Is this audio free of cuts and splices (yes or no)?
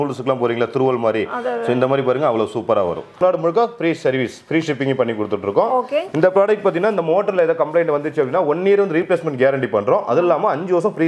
no